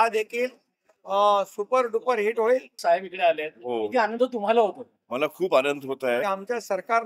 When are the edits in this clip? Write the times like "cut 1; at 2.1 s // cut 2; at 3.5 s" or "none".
cut 1; at 2.7 s // cut 2; at 6.2 s